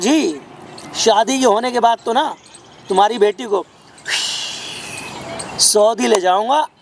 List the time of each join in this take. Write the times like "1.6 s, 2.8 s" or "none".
none